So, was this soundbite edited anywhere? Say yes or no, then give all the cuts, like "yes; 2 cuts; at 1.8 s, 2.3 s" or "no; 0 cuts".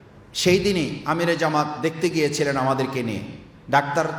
no; 0 cuts